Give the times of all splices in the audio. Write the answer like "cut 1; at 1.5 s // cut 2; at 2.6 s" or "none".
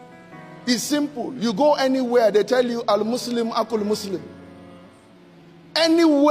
none

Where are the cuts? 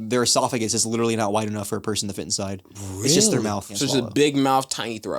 cut 1; at 3.7 s

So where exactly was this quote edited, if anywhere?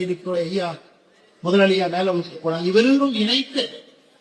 none

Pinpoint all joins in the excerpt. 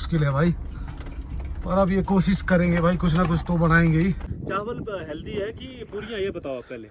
cut 1; at 4.3 s

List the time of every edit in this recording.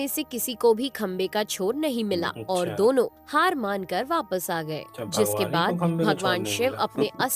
none

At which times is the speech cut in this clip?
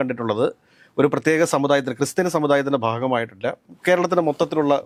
none

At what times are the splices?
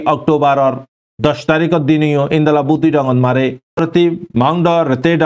cut 1; at 3.8 s

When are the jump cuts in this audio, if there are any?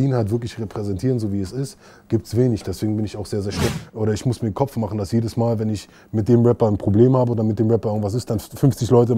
cut 1; at 3.7 s

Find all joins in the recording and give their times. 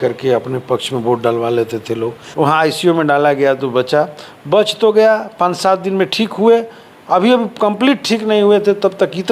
cut 1; at 2.2 s

